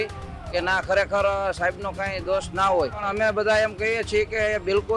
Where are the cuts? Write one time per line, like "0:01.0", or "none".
0:03.1